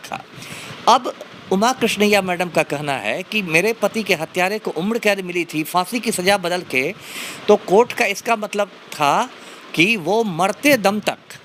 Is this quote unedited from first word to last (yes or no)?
yes